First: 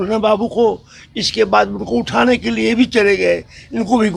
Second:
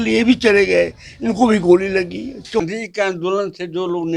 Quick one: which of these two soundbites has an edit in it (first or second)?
second